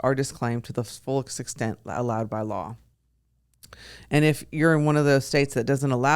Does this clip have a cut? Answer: no; 0 cuts

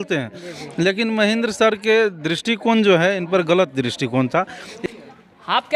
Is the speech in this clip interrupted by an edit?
no; 0 cuts

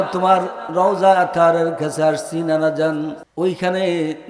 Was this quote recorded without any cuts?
no; 1 cut; at 3.2 s

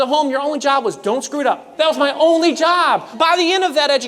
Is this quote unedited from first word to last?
no; 2 cuts; at 1.7 s, 3.1 s

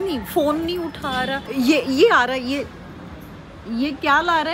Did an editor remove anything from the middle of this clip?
yes; 1 cut; at 1.4 s

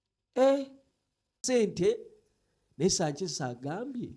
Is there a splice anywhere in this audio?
yes; 1 cut; at 1.4 s

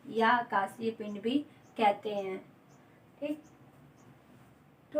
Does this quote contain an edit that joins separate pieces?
no; 0 cuts

